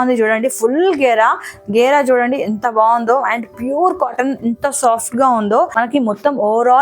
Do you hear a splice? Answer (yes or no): yes